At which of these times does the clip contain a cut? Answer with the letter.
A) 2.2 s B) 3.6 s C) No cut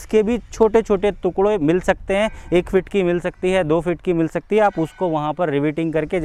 C